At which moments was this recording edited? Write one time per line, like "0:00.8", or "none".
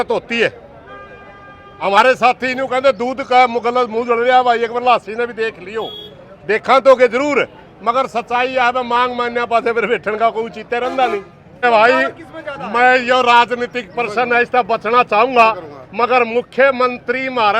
0:11.6